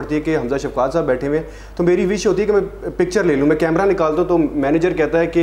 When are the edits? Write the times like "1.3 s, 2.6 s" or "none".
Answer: none